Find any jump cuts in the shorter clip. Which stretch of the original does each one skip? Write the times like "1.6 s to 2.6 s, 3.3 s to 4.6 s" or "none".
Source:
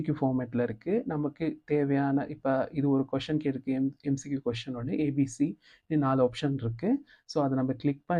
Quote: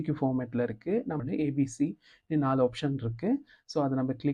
1.2 s to 4.8 s